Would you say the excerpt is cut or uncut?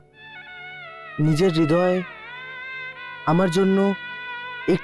uncut